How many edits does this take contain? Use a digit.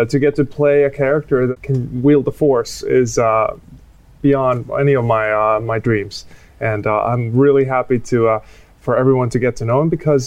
1